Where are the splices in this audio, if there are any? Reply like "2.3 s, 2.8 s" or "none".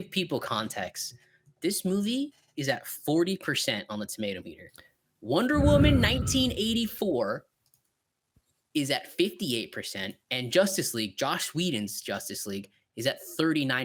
none